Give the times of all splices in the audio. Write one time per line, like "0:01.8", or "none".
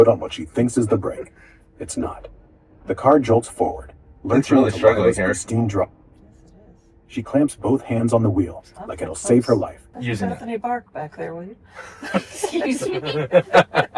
0:10.0